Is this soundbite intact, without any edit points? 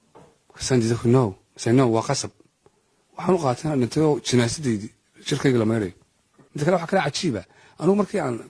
no; 1 cut; at 6.4 s

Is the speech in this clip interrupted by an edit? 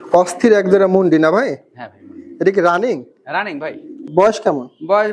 yes; 1 cut; at 4.0 s

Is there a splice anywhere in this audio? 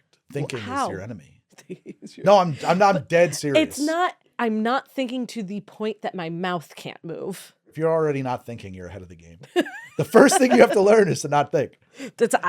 yes; 2 cuts; at 4.3 s, 7.6 s

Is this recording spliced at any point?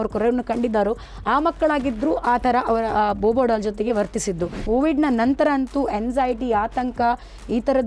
yes; 1 cut; at 4.6 s

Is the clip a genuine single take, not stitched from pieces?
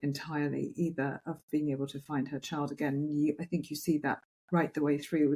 yes; 0 cuts

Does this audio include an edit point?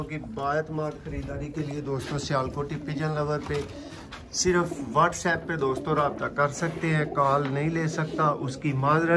no; 0 cuts

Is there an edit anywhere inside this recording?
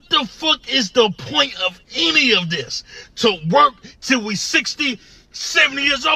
yes; 1 cut; at 1.8 s

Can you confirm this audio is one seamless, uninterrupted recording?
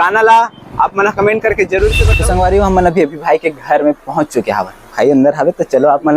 no; 1 cut; at 2.1 s

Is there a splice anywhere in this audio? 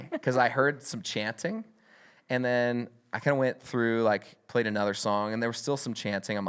no; 0 cuts

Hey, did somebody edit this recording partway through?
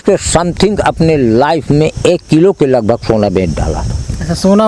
no; 0 cuts

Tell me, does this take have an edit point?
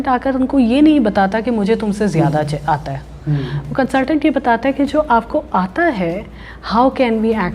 no; 0 cuts

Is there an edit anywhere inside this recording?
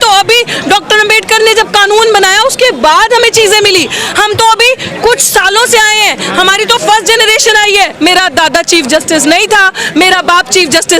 yes; 1 cut; at 7.9 s

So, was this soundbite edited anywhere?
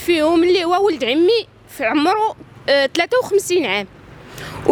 no; 0 cuts

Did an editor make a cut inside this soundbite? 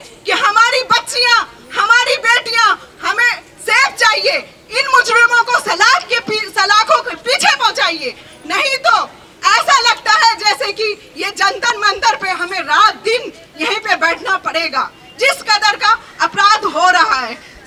no; 0 cuts

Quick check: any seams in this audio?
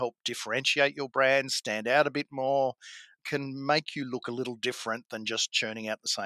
yes; 1 cut; at 3.2 s

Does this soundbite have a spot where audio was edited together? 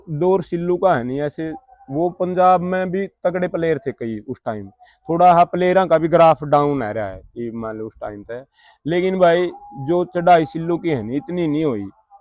no; 0 cuts

